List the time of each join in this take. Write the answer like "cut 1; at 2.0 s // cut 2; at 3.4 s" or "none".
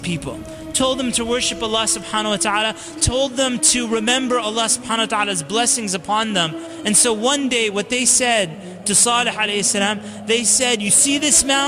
cut 1; at 6.7 s